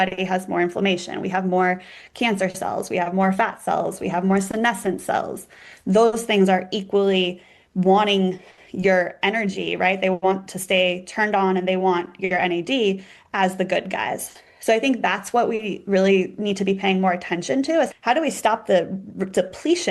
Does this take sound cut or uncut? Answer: uncut